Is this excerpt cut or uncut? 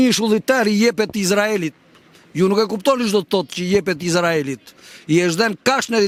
uncut